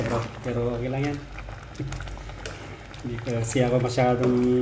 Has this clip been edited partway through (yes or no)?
no